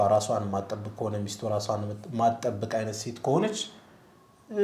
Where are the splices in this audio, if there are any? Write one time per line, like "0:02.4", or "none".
none